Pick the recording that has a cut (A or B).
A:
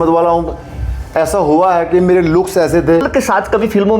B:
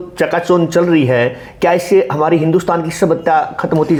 A